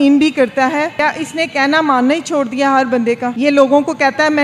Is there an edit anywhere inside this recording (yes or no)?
no